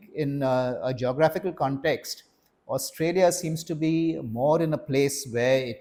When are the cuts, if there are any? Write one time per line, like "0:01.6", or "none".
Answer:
none